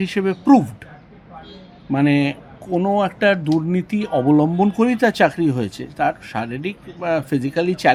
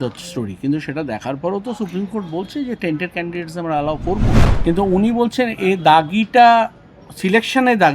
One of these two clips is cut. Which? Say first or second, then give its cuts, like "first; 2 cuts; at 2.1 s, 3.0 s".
second; 1 cut; at 4.5 s